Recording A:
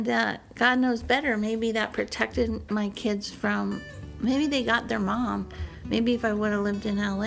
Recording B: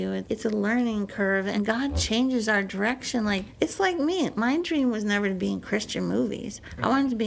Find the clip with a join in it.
B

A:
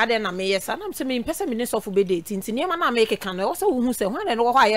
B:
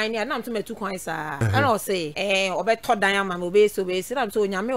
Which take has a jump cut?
B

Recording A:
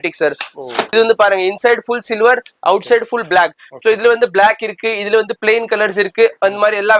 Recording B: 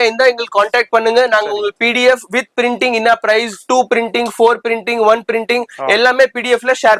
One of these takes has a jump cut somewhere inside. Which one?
A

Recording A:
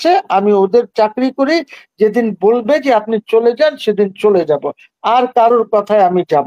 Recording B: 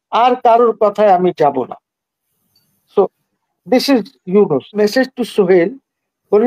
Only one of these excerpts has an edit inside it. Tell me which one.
B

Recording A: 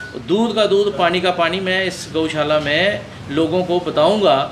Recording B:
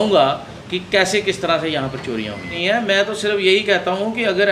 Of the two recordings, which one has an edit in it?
B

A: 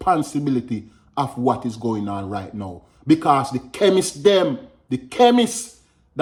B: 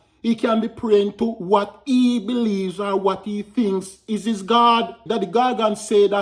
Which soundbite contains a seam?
B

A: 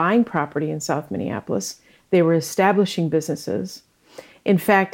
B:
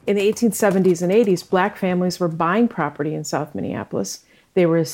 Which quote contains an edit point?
B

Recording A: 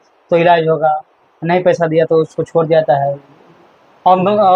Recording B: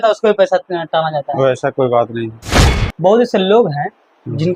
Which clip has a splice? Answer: B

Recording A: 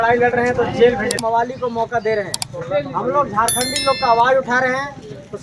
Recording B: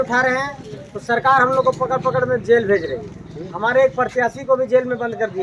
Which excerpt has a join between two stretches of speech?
A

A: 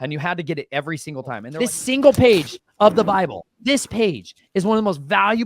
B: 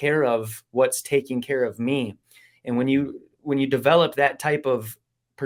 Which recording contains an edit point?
A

